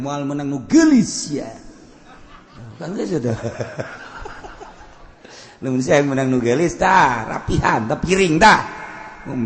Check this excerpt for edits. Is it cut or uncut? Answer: cut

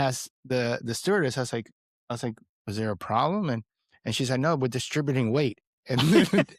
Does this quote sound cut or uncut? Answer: uncut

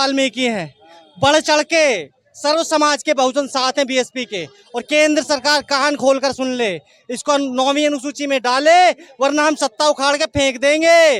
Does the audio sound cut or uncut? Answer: uncut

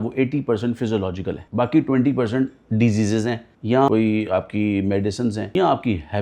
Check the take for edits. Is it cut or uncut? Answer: cut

